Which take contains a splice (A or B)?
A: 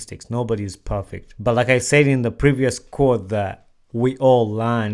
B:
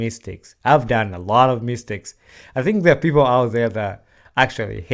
A